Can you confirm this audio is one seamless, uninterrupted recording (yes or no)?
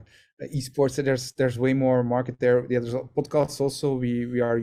yes